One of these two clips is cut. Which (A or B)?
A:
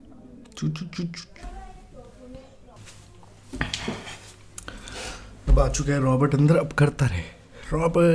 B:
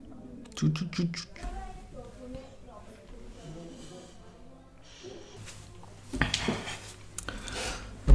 A